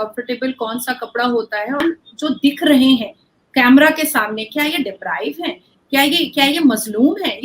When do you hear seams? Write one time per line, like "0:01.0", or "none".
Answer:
0:01.8